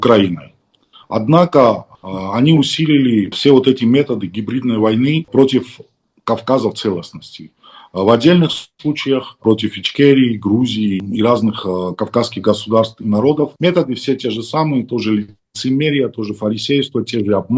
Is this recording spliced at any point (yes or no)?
yes